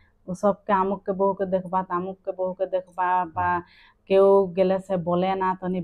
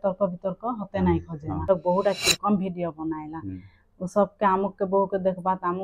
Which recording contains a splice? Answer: second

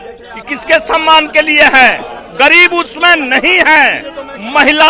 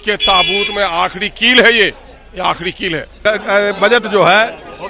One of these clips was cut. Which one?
second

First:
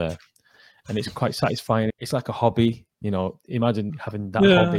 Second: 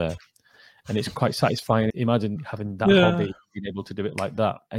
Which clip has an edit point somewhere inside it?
second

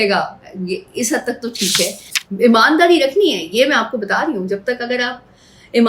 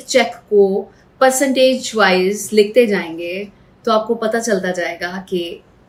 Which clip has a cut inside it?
first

